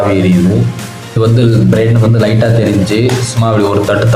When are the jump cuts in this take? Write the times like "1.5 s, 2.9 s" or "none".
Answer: 1.1 s